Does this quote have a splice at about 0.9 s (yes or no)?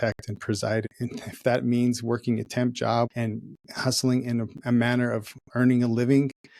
yes